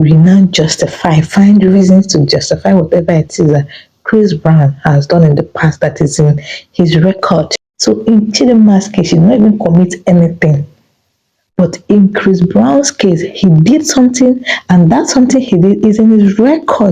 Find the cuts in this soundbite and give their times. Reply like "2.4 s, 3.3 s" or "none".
7.6 s